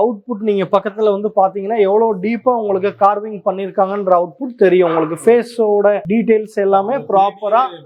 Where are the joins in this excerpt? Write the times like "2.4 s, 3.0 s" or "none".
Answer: none